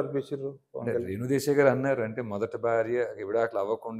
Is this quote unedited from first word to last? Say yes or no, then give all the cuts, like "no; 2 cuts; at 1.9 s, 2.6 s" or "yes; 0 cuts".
yes; 0 cuts